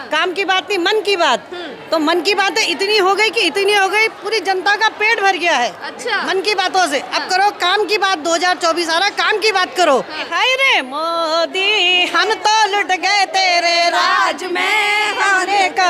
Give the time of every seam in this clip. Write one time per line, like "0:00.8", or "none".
0:10.2